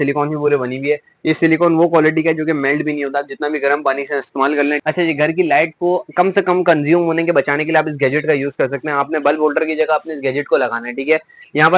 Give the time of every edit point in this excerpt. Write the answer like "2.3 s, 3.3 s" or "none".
4.8 s